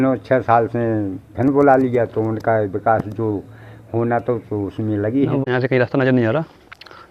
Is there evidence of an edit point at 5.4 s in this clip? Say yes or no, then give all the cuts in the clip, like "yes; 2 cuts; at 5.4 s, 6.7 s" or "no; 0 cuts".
yes; 1 cut; at 5.4 s